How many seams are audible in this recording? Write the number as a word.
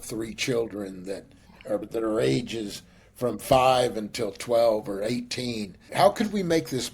two